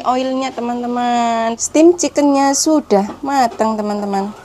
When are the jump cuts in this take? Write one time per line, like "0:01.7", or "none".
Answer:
0:01.6